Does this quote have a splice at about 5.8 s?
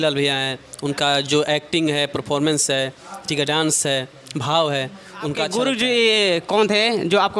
yes; 1 cut; at 5.8 s

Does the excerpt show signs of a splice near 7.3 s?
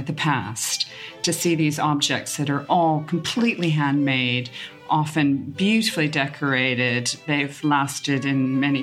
no; 0 cuts

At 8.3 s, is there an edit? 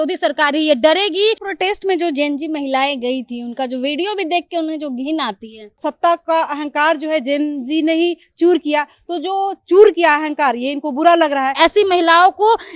no; 3 cuts; at 1.4 s, 5.8 s, 11.5 s

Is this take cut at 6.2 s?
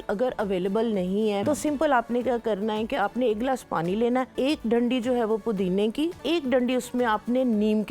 yes; 3 cuts; at 1.4 s, 4.3 s, 6.2 s

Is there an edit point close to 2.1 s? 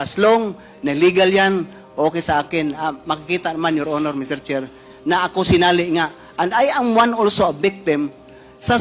no; 1 cut; at 0.9 s

